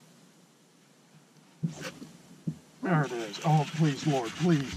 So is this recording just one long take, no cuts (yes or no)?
yes